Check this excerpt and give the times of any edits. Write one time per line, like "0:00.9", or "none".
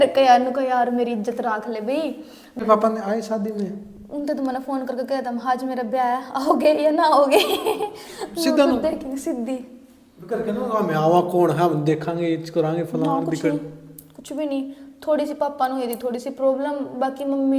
0:02.6